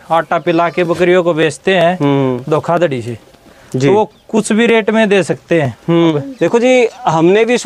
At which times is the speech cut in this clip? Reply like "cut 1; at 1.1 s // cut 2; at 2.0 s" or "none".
cut 1; at 6.1 s